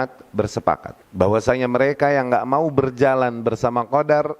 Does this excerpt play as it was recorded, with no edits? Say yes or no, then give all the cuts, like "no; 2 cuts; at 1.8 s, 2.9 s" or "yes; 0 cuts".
no; 1 cut; at 1.0 s